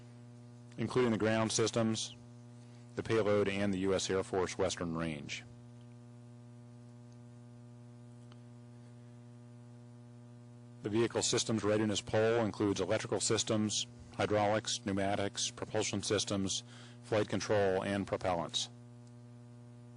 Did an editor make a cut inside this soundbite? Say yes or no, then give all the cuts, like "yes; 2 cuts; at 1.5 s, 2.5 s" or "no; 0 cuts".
no; 0 cuts